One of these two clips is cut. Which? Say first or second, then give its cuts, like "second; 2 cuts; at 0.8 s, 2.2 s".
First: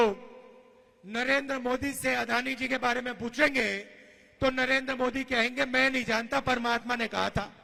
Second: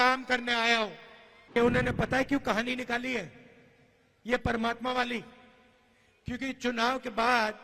second; 1 cut; at 1.5 s